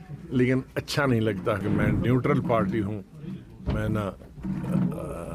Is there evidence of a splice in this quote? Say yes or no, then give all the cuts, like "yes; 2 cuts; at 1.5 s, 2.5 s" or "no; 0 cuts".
yes; 1 cut; at 1.6 s